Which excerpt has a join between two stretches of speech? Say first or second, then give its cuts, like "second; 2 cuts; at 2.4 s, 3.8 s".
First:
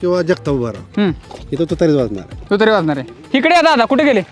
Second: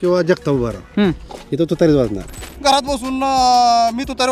second; 1 cut; at 2.4 s